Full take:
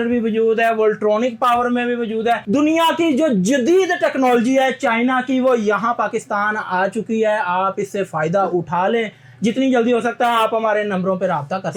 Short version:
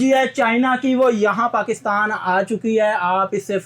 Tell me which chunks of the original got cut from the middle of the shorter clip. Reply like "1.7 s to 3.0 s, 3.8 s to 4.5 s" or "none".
none